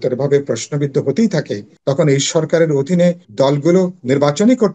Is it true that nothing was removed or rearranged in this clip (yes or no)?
no